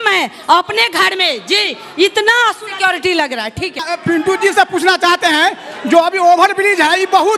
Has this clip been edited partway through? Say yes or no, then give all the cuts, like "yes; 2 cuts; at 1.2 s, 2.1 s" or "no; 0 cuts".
yes; 1 cut; at 3.9 s